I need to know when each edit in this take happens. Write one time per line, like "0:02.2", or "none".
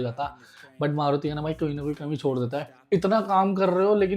0:02.7